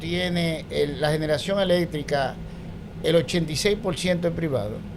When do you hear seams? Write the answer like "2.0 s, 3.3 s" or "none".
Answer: none